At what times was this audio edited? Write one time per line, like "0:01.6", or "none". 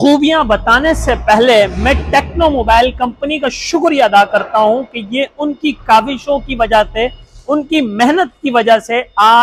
none